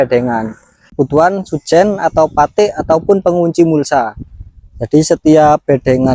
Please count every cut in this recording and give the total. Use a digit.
1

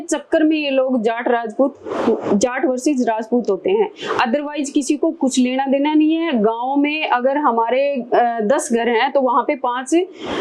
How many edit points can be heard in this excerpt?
0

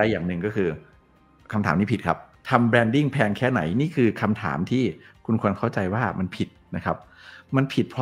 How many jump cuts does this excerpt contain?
0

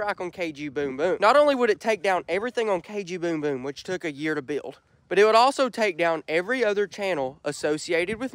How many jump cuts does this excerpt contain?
1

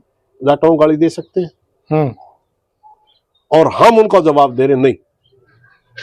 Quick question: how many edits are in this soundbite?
0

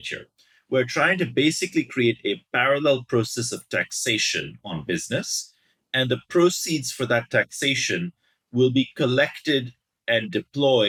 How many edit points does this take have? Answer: 0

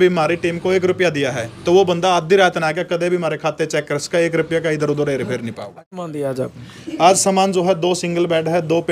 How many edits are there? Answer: 1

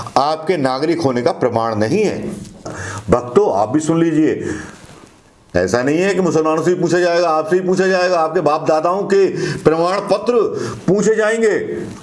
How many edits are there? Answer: 1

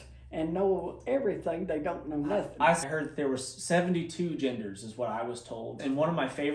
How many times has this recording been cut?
2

